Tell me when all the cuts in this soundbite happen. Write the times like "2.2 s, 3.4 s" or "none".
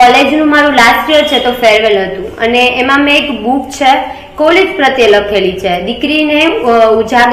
none

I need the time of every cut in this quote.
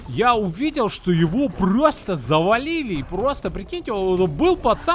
none

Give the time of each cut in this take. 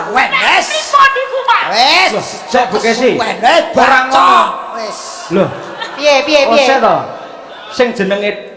none

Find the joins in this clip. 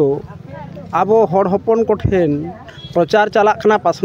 none

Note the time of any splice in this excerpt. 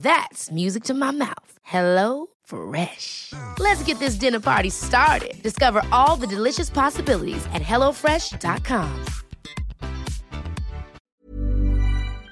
11.0 s

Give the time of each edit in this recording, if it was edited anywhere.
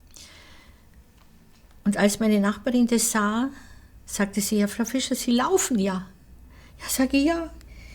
none

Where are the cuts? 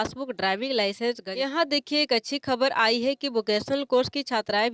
1.2 s

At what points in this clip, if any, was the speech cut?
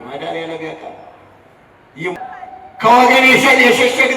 2.1 s

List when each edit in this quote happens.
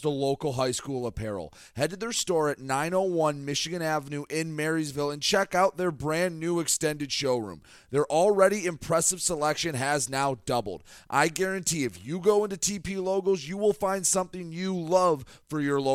none

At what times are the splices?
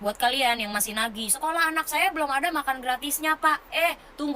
none

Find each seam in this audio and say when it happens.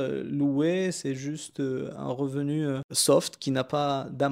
2.9 s

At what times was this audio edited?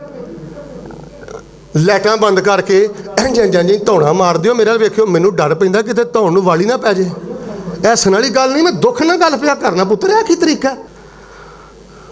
10.9 s

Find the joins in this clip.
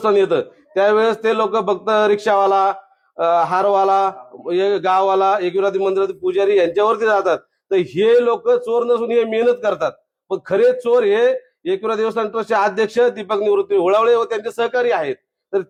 none

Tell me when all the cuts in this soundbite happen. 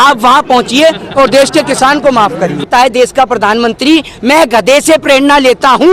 2.7 s

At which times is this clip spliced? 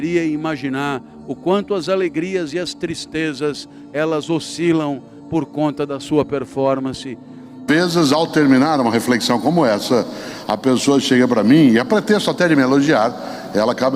7.5 s

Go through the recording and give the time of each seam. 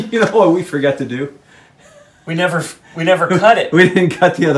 none

